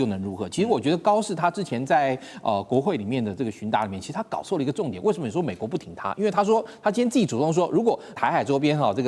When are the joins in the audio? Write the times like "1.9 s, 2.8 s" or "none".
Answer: 8.2 s